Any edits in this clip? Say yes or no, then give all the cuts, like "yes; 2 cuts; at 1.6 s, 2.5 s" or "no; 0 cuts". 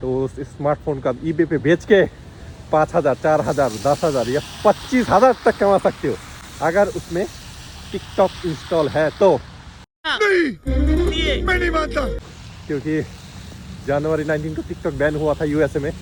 no; 0 cuts